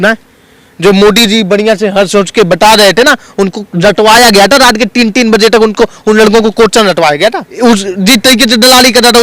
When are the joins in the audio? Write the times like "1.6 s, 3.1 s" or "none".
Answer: 7.5 s